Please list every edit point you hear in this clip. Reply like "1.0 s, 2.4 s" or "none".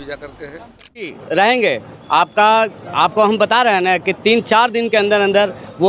1.2 s